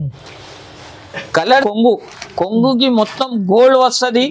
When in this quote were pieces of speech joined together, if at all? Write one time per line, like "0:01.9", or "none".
0:01.4